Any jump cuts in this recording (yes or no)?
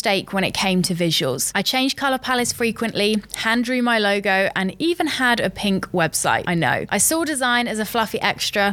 no